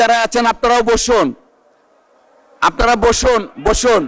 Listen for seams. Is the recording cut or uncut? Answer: uncut